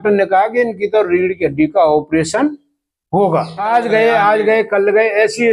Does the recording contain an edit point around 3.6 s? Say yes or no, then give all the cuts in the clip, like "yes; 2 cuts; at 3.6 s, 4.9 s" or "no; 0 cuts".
yes; 1 cut; at 3.6 s